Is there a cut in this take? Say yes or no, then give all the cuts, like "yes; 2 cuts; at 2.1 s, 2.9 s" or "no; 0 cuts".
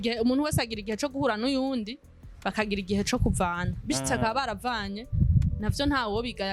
no; 0 cuts